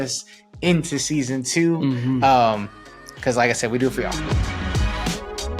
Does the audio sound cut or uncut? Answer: cut